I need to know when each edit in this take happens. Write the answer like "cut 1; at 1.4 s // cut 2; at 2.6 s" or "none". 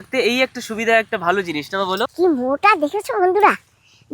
cut 1; at 2.1 s